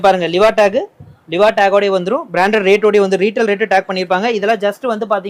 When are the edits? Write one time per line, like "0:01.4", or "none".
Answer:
none